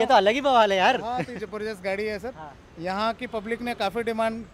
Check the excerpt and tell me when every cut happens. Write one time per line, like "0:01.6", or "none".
none